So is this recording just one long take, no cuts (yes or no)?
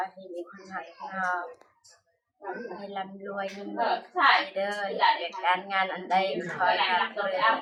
yes